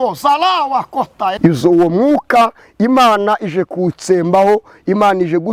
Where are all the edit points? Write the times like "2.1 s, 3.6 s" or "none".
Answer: 1.4 s